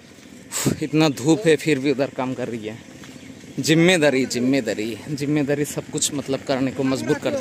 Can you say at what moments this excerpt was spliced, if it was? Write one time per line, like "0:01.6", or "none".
none